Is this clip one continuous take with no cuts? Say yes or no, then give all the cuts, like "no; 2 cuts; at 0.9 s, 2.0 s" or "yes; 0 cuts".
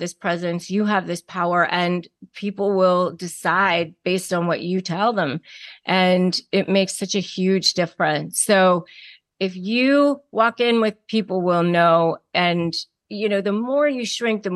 no; 2 cuts; at 11.0 s, 12.2 s